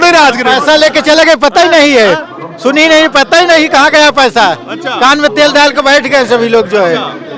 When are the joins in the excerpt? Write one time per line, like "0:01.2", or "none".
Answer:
none